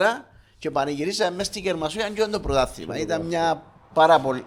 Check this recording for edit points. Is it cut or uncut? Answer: uncut